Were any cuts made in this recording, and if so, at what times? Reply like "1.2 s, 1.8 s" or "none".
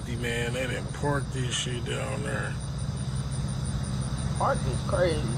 none